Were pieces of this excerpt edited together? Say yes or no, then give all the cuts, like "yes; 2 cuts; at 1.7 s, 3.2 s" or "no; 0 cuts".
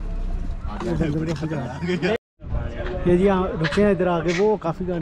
no; 0 cuts